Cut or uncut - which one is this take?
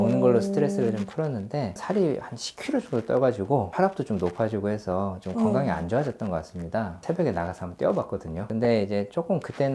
cut